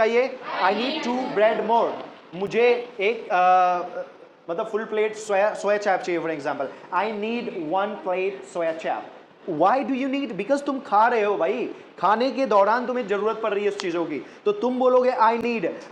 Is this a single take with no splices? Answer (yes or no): yes